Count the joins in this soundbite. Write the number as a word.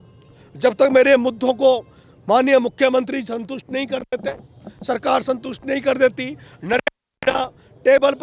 zero